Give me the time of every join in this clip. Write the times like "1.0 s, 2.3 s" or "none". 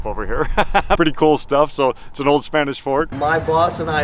3.1 s